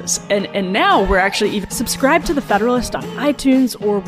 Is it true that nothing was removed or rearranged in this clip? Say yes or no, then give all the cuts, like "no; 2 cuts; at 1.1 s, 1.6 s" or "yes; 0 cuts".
no; 1 cut; at 1.7 s